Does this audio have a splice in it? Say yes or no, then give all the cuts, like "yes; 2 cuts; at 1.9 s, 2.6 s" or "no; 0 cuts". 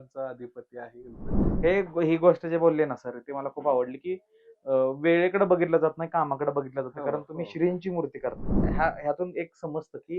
yes; 2 cuts; at 1.4 s, 8.7 s